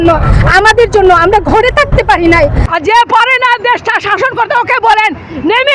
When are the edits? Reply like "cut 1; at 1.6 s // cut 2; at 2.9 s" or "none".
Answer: cut 1; at 2.6 s